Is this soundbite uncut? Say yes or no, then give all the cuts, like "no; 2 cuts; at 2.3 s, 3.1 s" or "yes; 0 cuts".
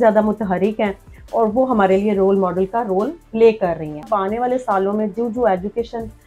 no; 1 cut; at 4.0 s